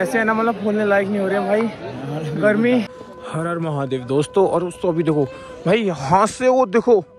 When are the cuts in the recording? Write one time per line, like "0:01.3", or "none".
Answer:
0:03.0